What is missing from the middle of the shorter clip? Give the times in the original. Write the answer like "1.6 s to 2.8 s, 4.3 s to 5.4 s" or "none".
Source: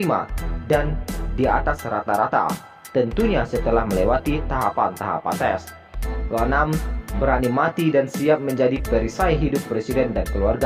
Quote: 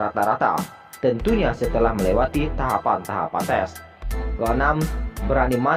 none